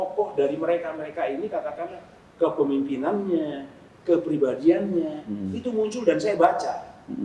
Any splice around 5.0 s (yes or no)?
no